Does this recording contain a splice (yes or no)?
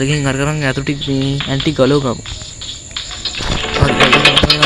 no